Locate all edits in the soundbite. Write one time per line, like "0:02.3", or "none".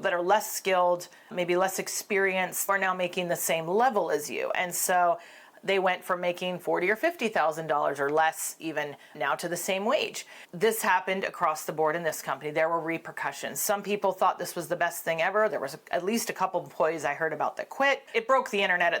0:18.0